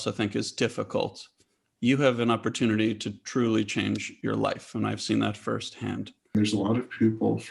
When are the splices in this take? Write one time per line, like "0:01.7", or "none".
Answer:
0:06.3

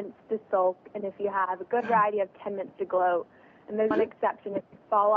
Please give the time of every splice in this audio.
0:03.9

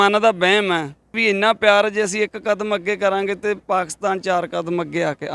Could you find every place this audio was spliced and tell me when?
0:01.2

